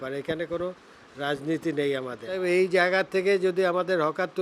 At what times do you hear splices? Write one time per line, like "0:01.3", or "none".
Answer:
0:02.4